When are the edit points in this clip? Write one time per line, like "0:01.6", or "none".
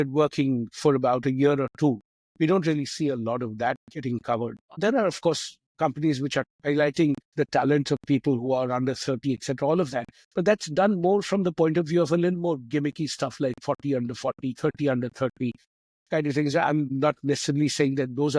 0:04.7
0:06.5